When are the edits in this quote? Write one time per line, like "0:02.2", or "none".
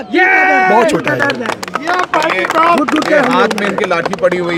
none